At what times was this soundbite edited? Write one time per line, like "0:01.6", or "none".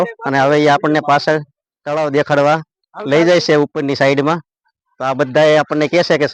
none